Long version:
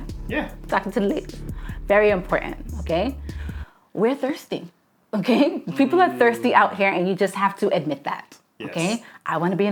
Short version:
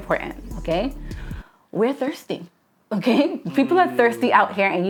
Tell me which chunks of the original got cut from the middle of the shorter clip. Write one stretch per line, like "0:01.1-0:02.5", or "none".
none